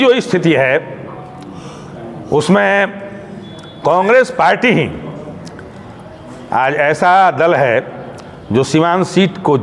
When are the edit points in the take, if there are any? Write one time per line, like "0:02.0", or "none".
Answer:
none